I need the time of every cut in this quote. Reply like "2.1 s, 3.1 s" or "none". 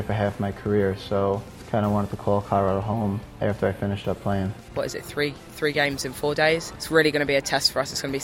1.5 s, 3.3 s, 4.7 s, 6.7 s